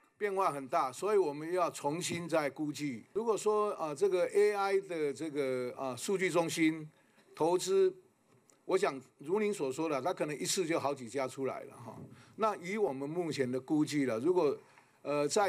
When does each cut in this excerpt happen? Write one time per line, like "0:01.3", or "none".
0:03.1